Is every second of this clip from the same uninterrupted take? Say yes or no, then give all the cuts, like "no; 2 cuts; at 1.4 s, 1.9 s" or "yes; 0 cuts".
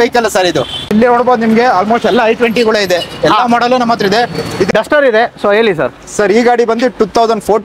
no; 2 cuts; at 0.9 s, 4.7 s